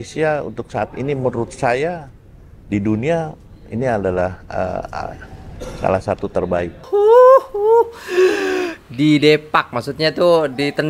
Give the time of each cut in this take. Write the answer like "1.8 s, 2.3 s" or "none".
6.8 s